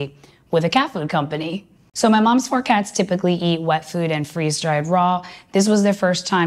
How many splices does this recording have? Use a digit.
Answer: 1